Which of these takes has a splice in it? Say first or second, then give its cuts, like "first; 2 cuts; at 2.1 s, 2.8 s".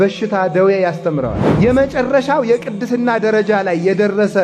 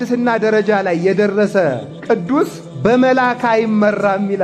first; 1 cut; at 1.4 s